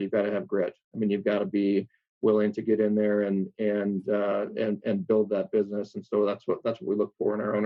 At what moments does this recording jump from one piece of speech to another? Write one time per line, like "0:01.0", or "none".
none